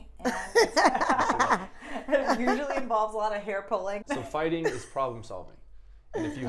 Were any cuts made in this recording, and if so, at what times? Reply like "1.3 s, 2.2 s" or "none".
4.0 s